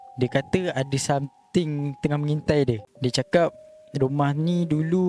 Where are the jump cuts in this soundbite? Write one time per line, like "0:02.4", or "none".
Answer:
0:02.9

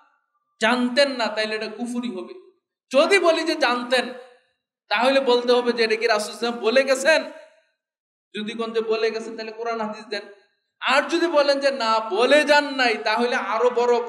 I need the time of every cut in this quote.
none

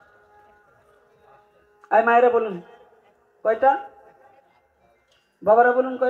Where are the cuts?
none

